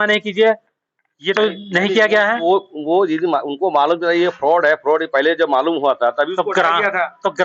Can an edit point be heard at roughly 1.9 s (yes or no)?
no